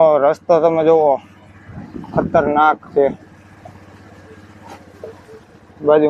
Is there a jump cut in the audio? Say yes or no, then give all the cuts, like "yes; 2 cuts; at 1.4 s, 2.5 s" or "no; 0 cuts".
no; 0 cuts